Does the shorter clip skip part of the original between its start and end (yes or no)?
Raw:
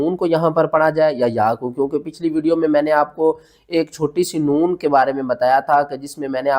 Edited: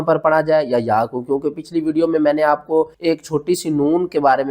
yes